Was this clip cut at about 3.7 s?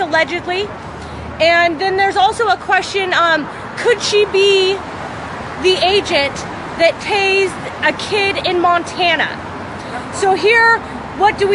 no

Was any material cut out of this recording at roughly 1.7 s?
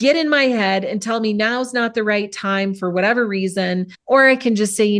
no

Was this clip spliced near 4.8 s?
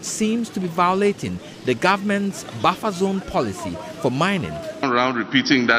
yes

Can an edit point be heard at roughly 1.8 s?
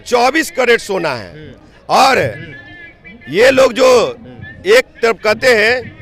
no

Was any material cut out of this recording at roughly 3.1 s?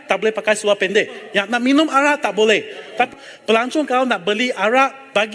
yes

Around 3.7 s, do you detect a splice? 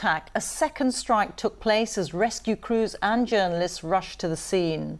yes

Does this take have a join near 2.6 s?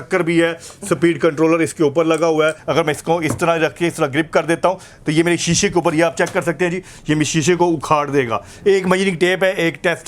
yes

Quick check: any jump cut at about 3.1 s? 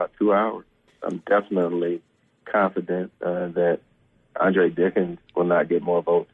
no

